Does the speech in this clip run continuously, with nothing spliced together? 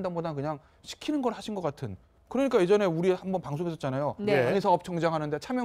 yes; 0 cuts

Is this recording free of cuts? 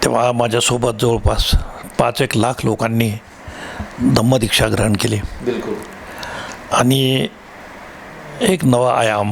yes; 0 cuts

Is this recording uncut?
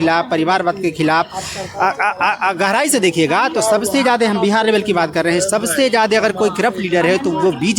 yes; 0 cuts

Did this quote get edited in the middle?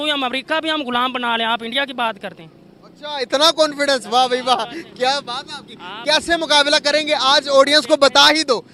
no; 0 cuts

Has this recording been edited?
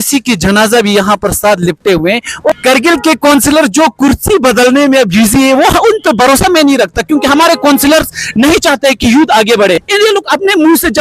yes; 2 cuts; at 2.5 s, 9.9 s

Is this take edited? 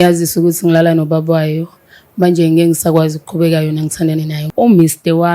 yes; 1 cut; at 4.4 s

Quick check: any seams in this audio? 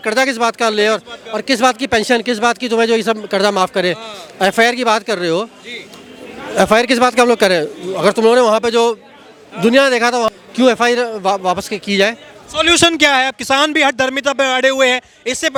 no; 0 cuts

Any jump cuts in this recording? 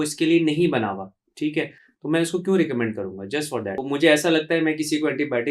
yes; 1 cut; at 3.7 s

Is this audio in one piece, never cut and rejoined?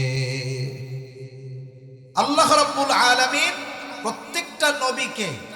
no; 1 cut; at 1.6 s

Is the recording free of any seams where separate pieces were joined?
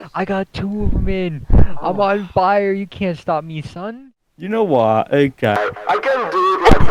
no; 1 cut; at 4.1 s

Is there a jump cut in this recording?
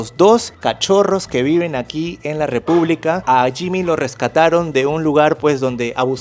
no; 0 cuts

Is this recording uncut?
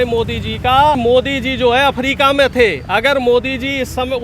no; 1 cut; at 1.0 s

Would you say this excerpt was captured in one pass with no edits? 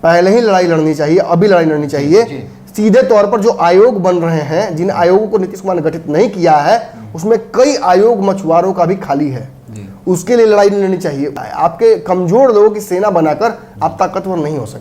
no; 1 cut; at 11.4 s

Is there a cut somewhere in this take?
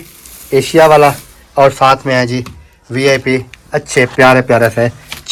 no; 0 cuts

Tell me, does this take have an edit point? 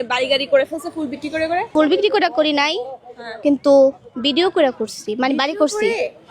yes; 1 cut; at 1.7 s

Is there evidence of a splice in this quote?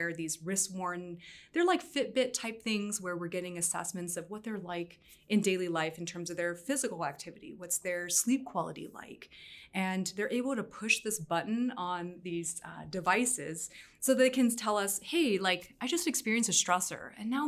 no; 0 cuts

